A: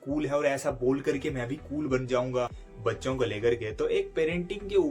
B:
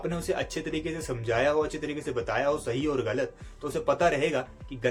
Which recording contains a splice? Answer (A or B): A